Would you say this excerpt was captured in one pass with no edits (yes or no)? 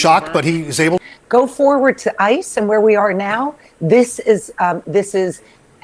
no